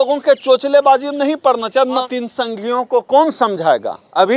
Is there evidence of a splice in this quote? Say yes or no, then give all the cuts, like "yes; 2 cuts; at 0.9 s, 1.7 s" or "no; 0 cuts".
yes; 1 cut; at 2.1 s